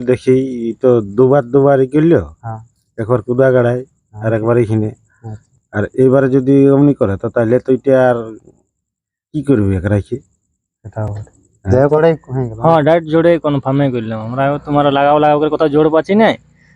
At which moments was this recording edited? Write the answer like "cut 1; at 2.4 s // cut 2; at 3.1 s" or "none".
cut 1; at 12.0 s

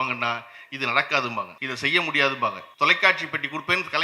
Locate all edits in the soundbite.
cut 1; at 1.6 s // cut 2; at 2.6 s

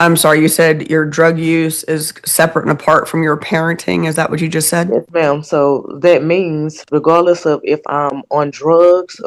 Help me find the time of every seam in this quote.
none

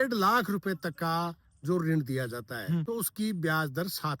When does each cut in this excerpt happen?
cut 1; at 2.8 s

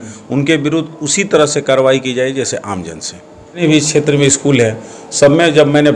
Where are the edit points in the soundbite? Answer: cut 1; at 3.6 s

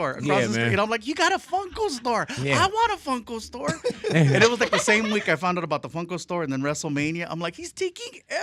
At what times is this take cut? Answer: none

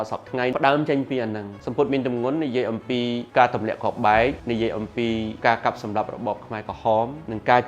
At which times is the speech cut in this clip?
cut 1; at 1.6 s

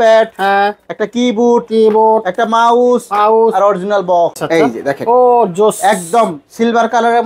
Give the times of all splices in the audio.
cut 1; at 4.4 s

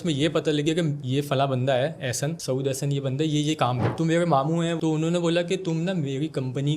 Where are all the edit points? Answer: cut 1; at 3.9 s // cut 2; at 4.8 s

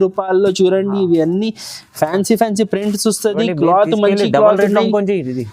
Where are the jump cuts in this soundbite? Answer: none

